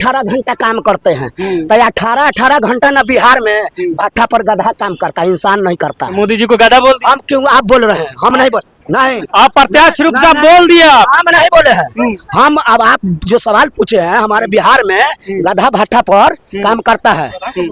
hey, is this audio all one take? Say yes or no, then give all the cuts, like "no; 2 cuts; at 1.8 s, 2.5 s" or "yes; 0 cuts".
yes; 0 cuts